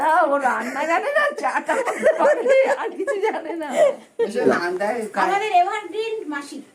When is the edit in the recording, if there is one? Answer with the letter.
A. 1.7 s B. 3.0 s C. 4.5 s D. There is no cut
C